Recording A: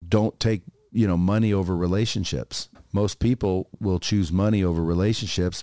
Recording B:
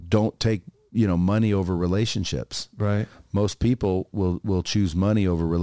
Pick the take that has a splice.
A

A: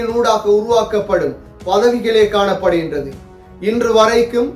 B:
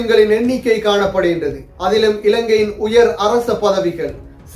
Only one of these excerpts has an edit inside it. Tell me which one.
B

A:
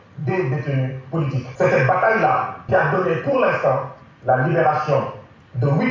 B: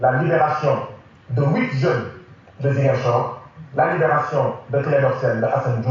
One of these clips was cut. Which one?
A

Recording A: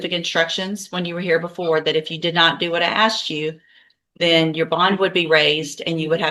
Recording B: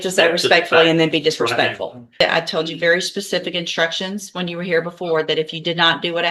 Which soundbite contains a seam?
B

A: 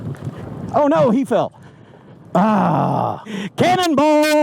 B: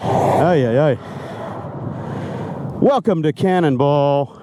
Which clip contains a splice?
A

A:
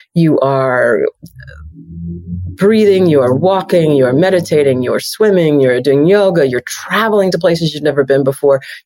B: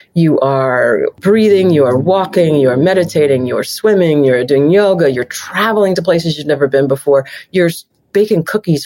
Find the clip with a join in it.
B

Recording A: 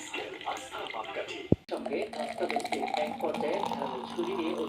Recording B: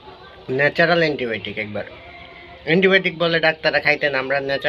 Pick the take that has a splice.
A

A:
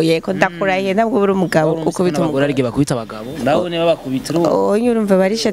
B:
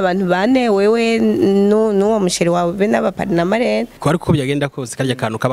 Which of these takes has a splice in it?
B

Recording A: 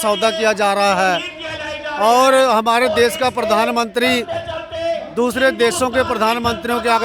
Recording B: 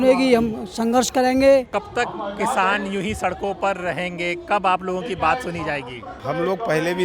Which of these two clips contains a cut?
B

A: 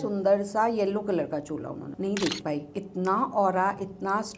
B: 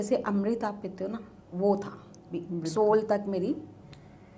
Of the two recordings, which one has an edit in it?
A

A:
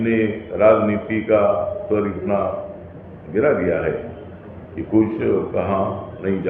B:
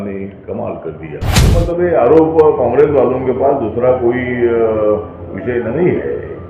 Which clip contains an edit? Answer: B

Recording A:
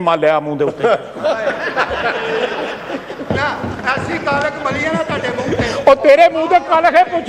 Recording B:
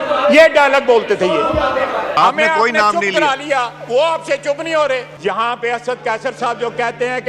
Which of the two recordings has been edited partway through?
B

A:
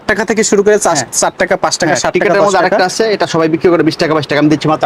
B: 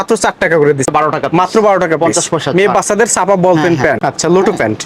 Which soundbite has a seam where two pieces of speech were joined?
B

